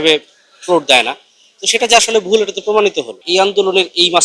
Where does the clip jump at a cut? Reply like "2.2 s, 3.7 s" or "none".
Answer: 3.2 s